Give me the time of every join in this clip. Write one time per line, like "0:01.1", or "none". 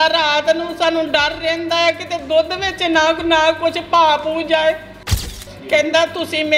0:05.3